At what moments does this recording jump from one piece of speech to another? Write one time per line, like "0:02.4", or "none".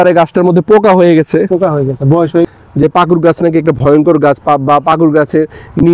0:02.5